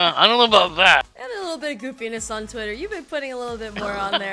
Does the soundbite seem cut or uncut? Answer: cut